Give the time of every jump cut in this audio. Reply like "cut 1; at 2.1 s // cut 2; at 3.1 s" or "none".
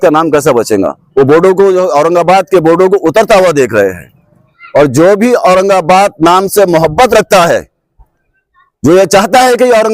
cut 1; at 4.5 s